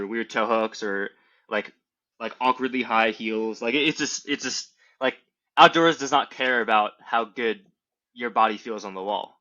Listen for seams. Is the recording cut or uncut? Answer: uncut